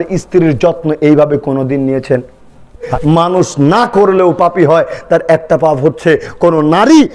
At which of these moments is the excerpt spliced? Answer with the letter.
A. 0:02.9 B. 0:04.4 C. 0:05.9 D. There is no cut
A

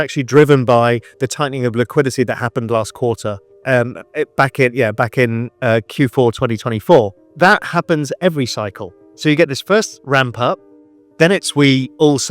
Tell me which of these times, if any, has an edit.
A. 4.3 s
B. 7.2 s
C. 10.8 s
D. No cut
B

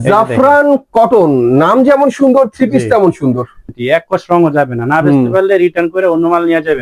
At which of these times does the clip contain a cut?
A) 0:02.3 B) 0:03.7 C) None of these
B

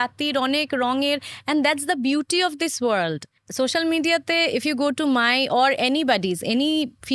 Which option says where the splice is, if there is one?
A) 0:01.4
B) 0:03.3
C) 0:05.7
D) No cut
B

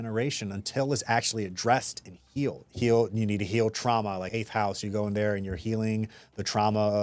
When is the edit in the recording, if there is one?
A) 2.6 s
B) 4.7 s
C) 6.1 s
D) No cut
A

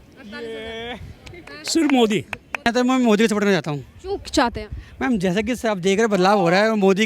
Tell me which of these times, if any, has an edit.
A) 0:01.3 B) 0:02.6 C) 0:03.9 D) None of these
B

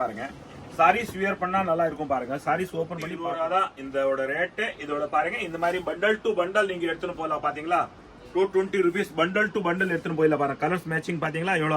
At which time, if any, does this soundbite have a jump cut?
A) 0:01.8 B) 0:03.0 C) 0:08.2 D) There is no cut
B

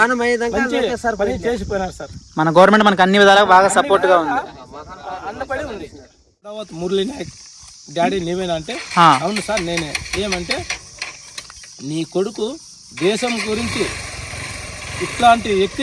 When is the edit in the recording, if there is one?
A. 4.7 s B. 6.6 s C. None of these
B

